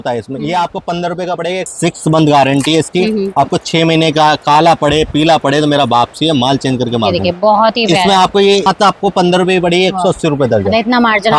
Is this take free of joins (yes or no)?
no